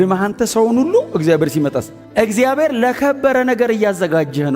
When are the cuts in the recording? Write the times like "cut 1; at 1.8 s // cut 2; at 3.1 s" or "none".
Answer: cut 1; at 1.9 s